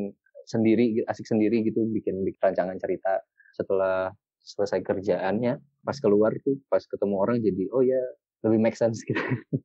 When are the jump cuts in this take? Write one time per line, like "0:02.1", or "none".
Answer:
none